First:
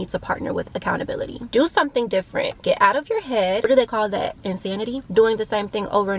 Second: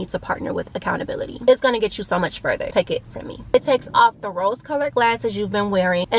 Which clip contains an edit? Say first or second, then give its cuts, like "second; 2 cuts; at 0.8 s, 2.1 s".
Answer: first; 2 cuts; at 1.4 s, 3.6 s